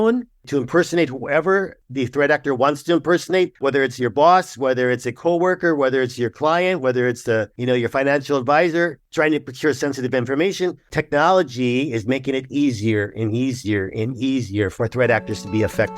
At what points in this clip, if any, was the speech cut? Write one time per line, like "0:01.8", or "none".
0:01.8
0:03.5
0:07.5
0:09.0
0:10.9
0:14.7